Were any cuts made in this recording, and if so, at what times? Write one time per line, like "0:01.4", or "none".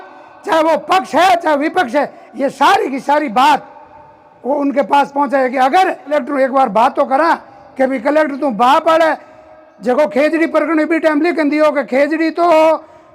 0:06.1